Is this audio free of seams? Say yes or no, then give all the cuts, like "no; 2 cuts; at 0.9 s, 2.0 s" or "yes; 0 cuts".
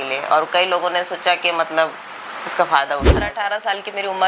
no; 1 cut; at 3.3 s